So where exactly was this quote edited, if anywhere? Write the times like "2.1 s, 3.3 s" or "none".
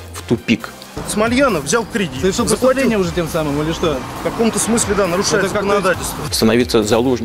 1.1 s, 2.1 s, 6.1 s